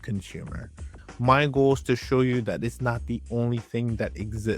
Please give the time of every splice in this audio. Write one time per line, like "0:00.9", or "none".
0:01.0

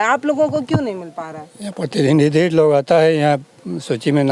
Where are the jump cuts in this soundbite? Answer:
none

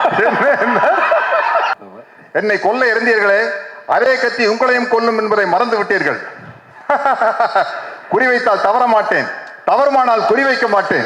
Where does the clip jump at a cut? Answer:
0:01.7

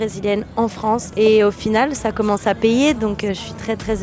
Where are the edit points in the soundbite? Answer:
0:01.1

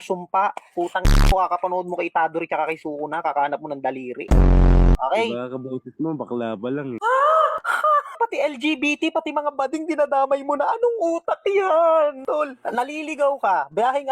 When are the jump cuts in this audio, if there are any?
0:05.0

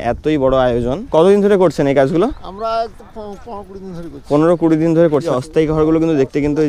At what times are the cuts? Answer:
0:01.0
0:05.3

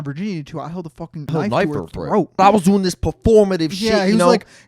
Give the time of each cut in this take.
0:01.3
0:02.4

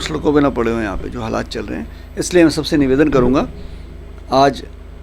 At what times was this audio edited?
none

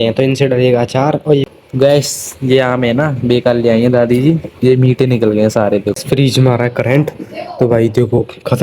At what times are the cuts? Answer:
0:01.4
0:06.0

